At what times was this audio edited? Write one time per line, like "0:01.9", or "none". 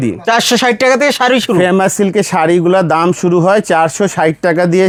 none